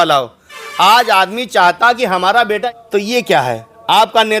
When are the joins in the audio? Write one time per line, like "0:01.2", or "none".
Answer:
0:02.7